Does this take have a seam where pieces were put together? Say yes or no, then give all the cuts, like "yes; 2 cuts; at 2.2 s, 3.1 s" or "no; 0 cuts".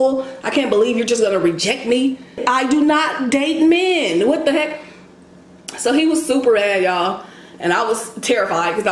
yes; 1 cut; at 2.5 s